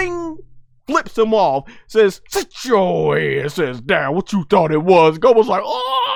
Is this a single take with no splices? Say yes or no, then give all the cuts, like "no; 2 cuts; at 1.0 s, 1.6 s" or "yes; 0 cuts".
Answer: yes; 0 cuts